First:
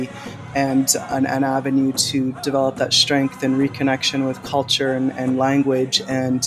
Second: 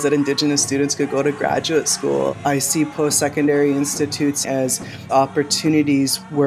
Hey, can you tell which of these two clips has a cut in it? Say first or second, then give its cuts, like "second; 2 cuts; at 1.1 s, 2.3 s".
second; 2 cuts; at 2.3 s, 4.4 s